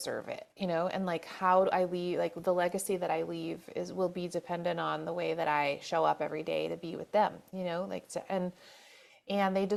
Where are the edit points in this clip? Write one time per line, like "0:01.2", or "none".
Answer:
none